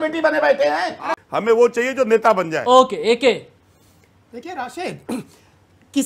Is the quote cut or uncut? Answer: cut